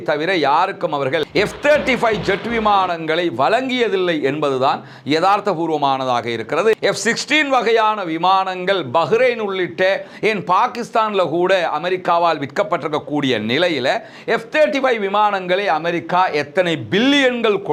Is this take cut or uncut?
uncut